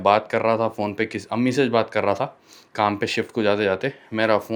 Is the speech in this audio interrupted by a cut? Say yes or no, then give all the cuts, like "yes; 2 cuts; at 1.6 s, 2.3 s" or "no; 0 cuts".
no; 0 cuts